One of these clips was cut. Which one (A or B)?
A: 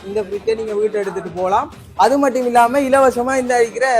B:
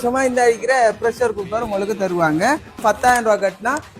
B